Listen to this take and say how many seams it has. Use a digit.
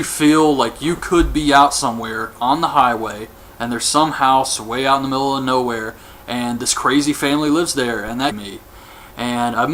0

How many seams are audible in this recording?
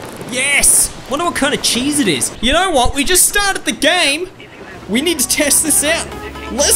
1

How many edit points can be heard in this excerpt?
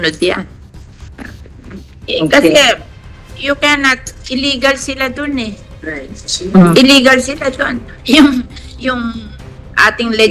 0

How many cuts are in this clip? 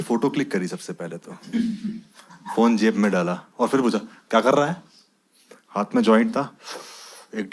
0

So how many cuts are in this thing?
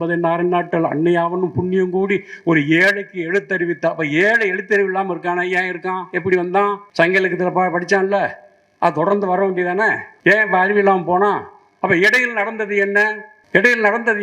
3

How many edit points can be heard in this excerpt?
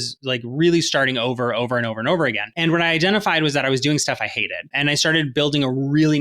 2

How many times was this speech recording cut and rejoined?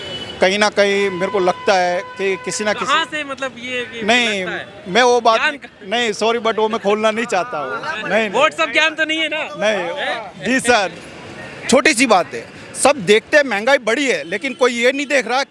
1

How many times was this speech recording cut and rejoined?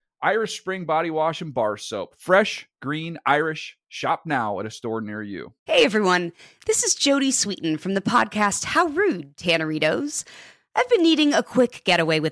1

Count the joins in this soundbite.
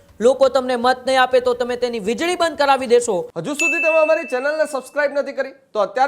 1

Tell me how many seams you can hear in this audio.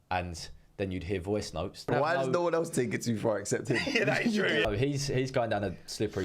2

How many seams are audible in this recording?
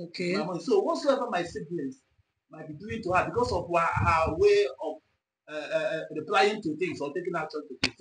0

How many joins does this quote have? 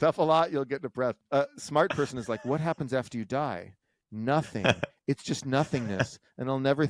1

